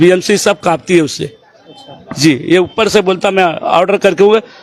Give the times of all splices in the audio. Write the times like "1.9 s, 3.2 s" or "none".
none